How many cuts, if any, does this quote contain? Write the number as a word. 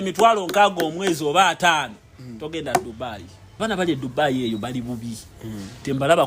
one